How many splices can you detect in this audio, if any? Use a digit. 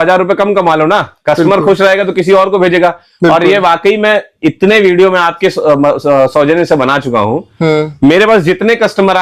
0